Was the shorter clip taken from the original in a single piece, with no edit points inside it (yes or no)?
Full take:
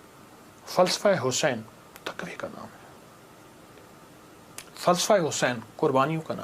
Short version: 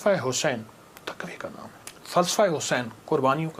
no